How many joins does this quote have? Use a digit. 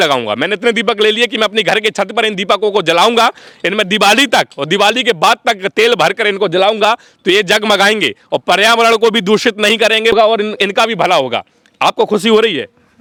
0